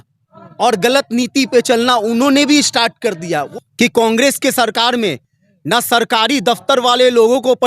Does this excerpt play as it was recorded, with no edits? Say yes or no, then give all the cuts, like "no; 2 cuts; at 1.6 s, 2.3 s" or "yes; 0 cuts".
no; 1 cut; at 3.5 s